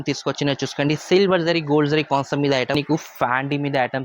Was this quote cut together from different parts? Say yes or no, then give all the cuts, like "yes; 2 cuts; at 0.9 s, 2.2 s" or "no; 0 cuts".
yes; 1 cut; at 2.8 s